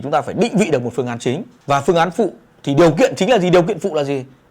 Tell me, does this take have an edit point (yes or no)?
yes